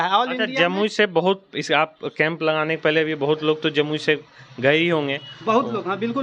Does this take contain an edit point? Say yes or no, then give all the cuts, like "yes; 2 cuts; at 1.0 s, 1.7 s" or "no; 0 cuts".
no; 0 cuts